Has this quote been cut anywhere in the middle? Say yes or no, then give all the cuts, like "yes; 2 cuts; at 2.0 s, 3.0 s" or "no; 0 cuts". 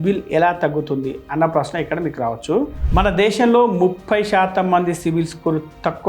yes; 1 cut; at 2.8 s